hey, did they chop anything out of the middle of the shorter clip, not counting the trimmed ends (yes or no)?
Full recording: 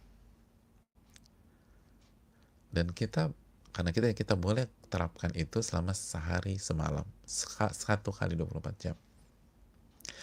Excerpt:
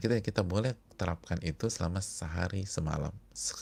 no